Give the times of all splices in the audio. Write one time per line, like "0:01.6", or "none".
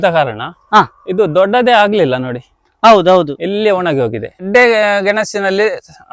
0:04.5